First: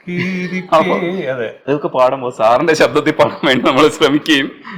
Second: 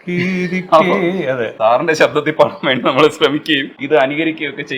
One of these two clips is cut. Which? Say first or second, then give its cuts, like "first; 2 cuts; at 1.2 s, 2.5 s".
second; 2 cuts; at 1.5 s, 3.7 s